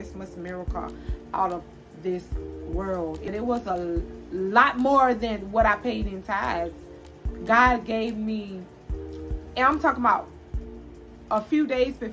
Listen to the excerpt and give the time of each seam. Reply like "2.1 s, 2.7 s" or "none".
none